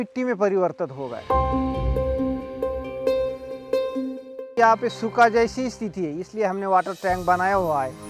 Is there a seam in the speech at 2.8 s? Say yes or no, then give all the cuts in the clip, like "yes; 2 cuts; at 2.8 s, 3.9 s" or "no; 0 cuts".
no; 1 cut; at 4.5 s